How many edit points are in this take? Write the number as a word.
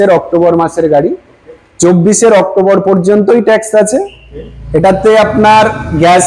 zero